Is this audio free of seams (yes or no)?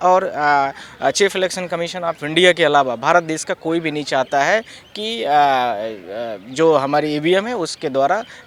yes